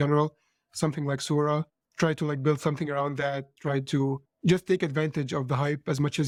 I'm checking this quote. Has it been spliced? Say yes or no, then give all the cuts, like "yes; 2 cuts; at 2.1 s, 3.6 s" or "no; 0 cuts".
no; 0 cuts